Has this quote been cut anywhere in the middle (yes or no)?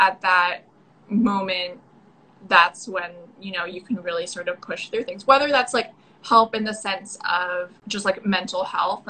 yes